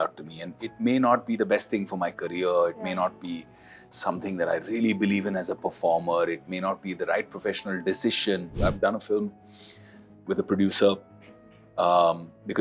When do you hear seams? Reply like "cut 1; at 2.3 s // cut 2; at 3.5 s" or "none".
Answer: cut 1; at 8.5 s

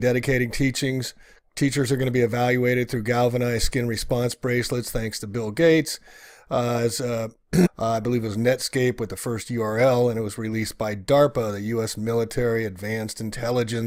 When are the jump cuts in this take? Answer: none

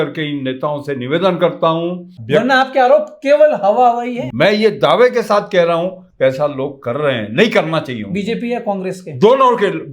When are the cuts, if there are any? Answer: cut 1; at 2.1 s // cut 2; at 4.2 s

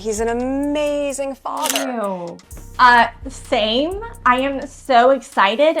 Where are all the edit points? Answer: cut 1; at 1.8 s

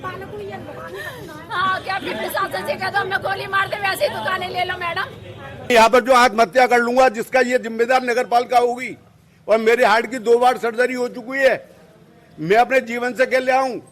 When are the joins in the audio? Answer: cut 1; at 5.7 s

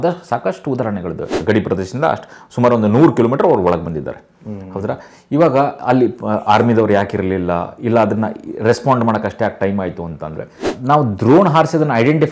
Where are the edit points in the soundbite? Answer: cut 1; at 1.4 s // cut 2; at 10.7 s

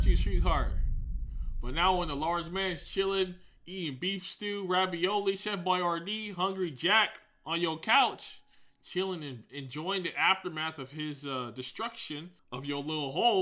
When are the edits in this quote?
cut 1; at 12.4 s

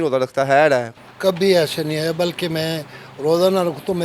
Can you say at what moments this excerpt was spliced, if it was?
cut 1; at 0.9 s

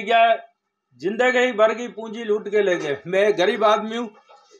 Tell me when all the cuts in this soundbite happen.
none

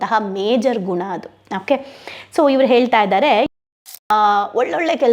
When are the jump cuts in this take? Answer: cut 1; at 3.5 s

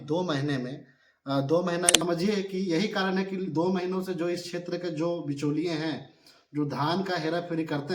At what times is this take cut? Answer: cut 1; at 2.0 s

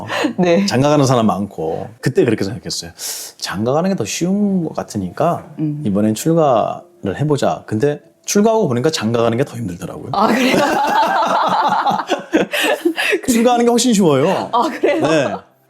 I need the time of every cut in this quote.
none

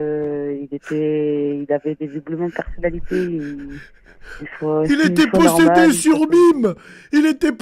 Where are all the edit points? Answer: none

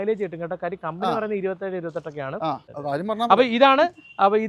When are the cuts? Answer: cut 1; at 2.7 s

